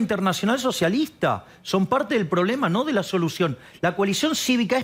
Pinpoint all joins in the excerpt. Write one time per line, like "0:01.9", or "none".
none